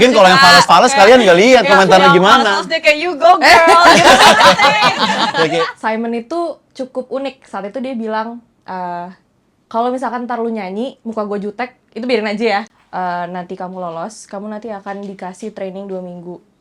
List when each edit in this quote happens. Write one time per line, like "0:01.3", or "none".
0:05.7
0:12.7